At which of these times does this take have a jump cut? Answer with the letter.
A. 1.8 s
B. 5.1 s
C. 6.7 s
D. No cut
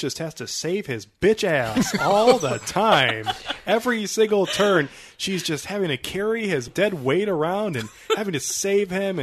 C